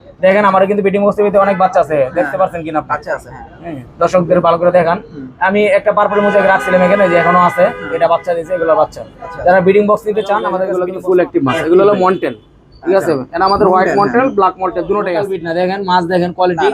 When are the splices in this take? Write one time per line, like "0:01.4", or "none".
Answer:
0:10.7
0:15.3